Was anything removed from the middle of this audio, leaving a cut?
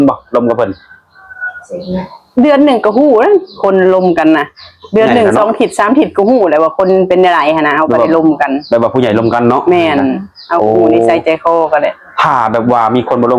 no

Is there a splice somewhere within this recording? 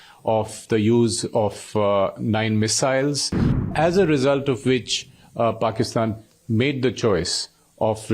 yes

